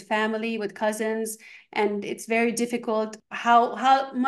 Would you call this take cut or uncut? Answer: cut